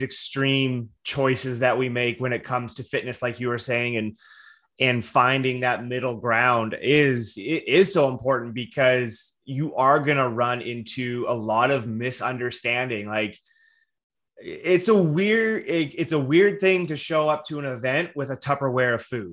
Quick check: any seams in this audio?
no; 0 cuts

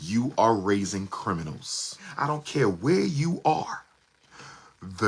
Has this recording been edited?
yes; 1 cut; at 2.2 s

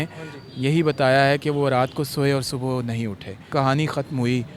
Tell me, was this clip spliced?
yes; 1 cut; at 3.4 s

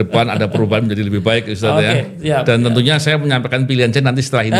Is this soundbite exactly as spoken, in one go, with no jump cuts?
yes; 0 cuts

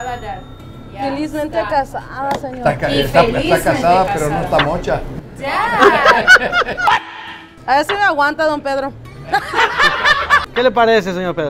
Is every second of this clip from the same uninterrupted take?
no; 1 cut; at 10.5 s

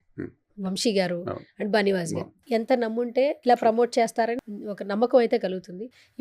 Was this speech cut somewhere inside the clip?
yes; 3 cuts; at 2.4 s, 3.4 s, 4.4 s

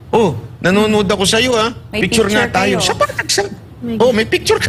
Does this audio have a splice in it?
no; 0 cuts

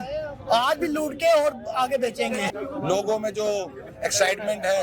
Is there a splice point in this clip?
yes; 1 cut; at 2.5 s

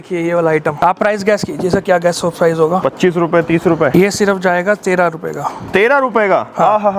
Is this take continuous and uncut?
no; 3 cuts; at 0.8 s, 2.8 s, 3.9 s

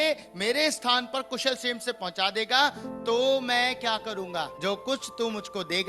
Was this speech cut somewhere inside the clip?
yes; 1 cut; at 4.5 s

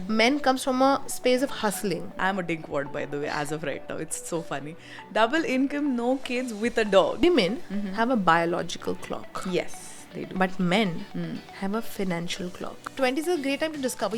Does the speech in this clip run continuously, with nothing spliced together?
no; 3 cuts; at 2.2 s, 7.2 s, 12.8 s

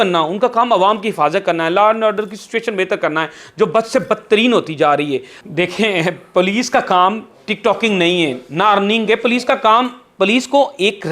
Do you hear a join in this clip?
yes; 1 cut; at 5.3 s

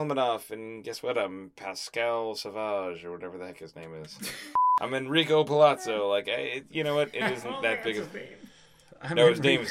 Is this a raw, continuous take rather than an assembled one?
no; 1 cut; at 4.5 s

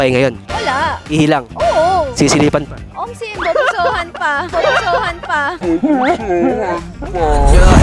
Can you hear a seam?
no; 0 cuts

